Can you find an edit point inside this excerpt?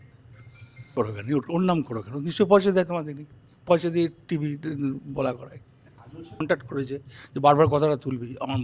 yes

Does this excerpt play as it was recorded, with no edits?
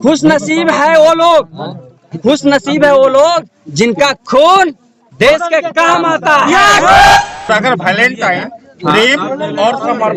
no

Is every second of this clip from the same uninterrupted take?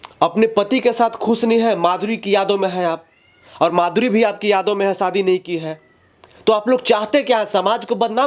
yes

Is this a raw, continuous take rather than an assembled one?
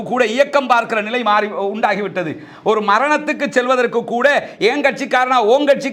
yes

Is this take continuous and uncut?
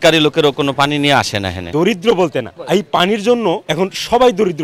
no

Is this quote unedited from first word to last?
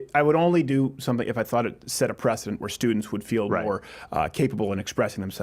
yes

